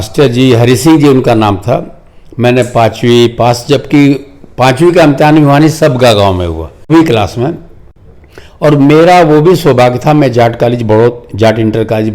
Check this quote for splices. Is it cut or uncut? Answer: cut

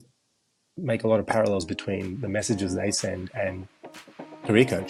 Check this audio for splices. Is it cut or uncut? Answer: uncut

